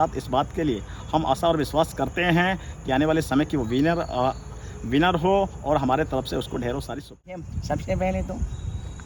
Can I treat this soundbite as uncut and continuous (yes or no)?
no